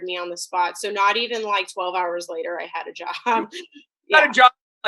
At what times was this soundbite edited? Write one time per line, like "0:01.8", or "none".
none